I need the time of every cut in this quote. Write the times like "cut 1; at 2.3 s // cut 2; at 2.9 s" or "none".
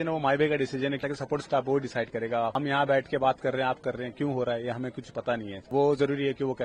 cut 1; at 1.0 s // cut 2; at 2.5 s // cut 3; at 5.5 s

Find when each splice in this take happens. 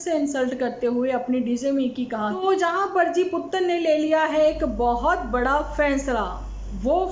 cut 1; at 2.4 s

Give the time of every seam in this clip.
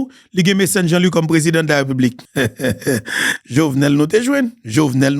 cut 1; at 2.2 s

